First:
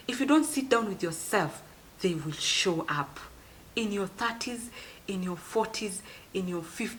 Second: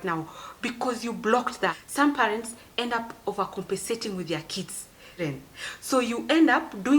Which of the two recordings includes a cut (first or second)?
second